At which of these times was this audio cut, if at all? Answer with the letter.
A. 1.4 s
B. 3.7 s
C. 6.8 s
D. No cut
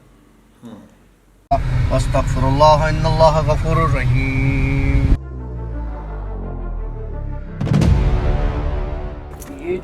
A